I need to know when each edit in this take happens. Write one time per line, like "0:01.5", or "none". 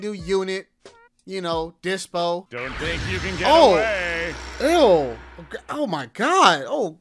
0:02.5